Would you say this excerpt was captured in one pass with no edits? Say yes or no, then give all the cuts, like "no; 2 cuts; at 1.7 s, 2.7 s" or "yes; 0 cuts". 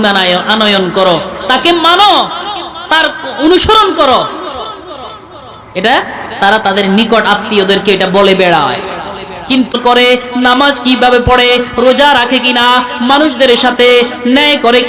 no; 1 cut; at 9.7 s